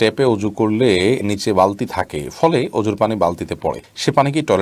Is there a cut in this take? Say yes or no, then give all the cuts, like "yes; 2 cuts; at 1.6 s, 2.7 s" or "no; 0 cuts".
no; 0 cuts